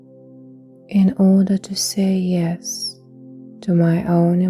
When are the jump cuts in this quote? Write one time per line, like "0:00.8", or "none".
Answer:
0:00.9

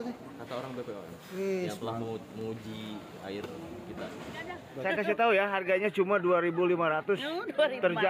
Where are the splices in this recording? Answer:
0:04.7

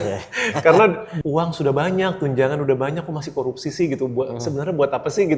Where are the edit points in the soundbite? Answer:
0:01.1

